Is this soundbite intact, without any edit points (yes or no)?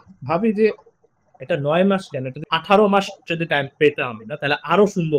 no